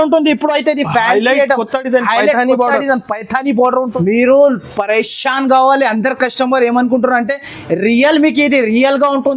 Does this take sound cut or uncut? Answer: cut